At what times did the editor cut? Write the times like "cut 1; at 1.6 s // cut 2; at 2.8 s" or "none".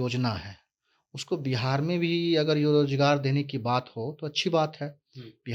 none